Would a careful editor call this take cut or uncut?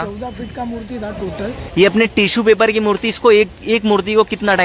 cut